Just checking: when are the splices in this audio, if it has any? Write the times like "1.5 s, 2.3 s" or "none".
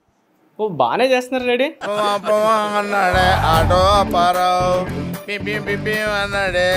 none